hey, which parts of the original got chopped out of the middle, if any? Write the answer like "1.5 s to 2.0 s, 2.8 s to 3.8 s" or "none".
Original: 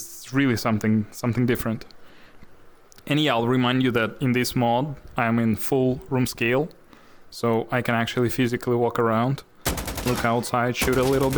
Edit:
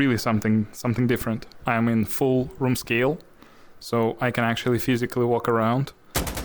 1.9 s to 5.0 s